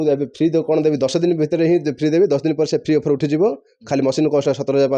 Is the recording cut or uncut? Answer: uncut